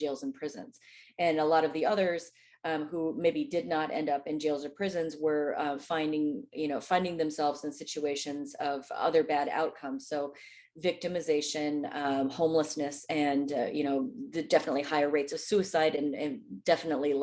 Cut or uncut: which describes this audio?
uncut